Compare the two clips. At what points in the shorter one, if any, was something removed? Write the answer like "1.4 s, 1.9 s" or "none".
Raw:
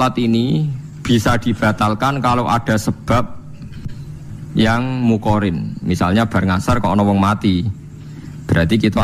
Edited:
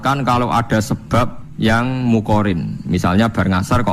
1.4 s